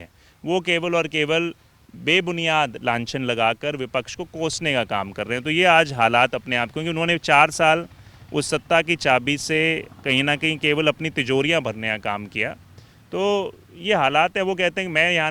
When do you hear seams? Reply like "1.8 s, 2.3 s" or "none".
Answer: none